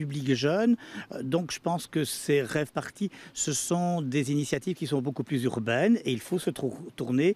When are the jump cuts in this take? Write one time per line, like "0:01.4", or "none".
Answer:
none